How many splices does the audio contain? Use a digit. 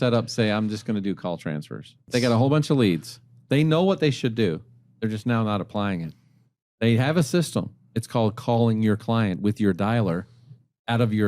1